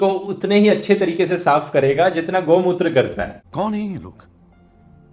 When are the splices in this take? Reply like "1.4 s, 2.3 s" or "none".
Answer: none